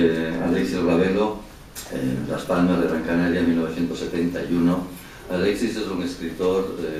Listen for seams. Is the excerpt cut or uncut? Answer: uncut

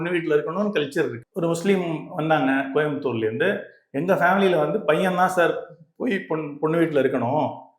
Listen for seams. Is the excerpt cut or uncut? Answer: cut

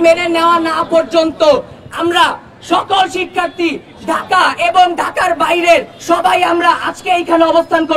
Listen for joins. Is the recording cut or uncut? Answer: uncut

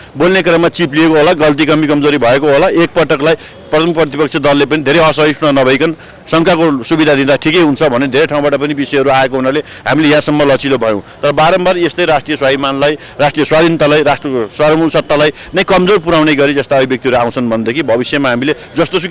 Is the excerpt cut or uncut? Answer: uncut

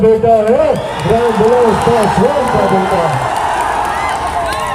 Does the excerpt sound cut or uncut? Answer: uncut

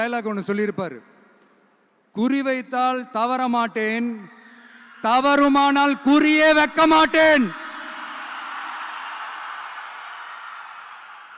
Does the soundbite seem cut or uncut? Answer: uncut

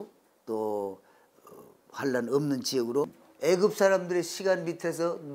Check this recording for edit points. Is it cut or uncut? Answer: cut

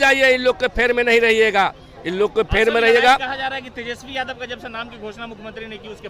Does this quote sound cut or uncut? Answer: uncut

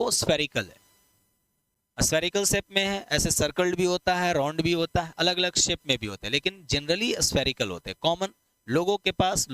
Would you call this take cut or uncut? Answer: uncut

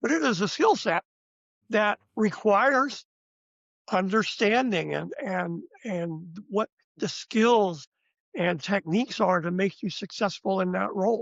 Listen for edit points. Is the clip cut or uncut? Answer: uncut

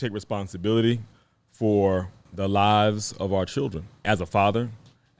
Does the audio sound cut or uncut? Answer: cut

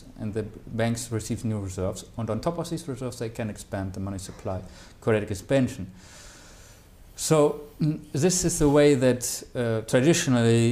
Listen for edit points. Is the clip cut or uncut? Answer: uncut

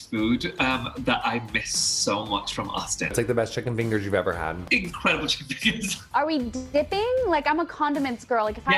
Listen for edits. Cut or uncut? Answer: cut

